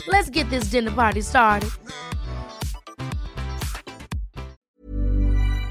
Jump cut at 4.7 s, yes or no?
yes